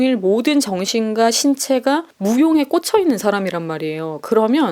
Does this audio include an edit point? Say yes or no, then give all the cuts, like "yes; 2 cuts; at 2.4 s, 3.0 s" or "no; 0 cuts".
no; 0 cuts